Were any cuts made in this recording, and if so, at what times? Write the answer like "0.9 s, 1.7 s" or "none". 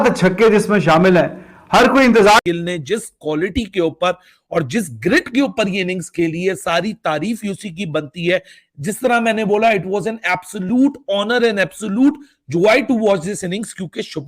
2.4 s